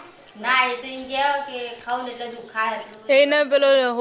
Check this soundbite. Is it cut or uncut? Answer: uncut